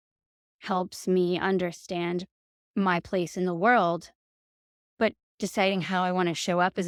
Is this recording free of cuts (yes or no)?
yes